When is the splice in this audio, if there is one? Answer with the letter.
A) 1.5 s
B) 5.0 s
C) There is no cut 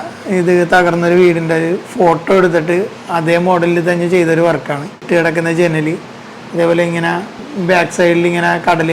B